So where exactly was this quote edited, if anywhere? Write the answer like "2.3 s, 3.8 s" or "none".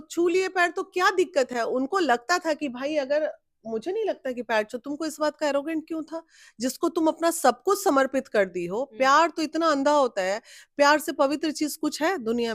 none